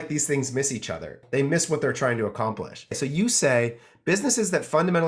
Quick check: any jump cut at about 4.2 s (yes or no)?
no